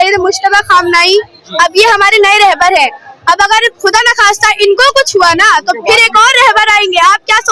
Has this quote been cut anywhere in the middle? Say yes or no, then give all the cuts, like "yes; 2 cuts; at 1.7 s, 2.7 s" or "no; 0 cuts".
no; 0 cuts